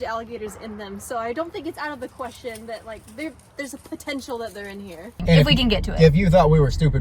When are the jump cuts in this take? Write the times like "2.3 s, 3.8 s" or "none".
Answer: 5.1 s